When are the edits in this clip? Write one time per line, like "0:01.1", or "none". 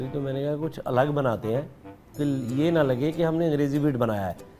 none

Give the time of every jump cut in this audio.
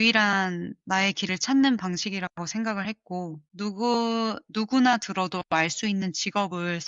0:03.4

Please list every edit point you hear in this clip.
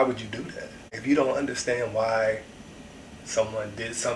0:00.9

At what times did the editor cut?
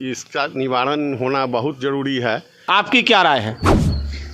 0:02.5

